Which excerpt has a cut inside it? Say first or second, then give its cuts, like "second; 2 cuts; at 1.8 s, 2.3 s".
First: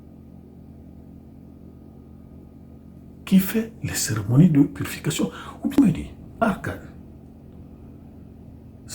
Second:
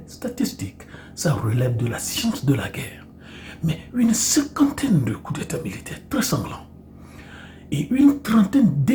first; 1 cut; at 5.7 s